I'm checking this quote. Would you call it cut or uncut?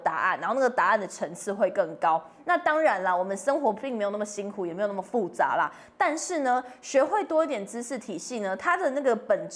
uncut